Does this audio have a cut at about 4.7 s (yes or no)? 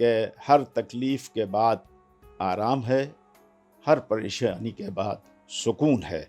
no